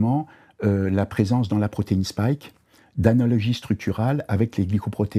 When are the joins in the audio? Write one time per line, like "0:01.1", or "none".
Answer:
none